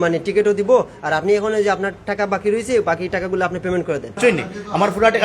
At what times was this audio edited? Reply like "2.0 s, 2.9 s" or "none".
4.1 s